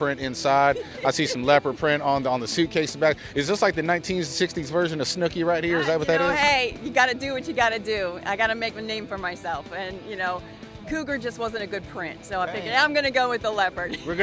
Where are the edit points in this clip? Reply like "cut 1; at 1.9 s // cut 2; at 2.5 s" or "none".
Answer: none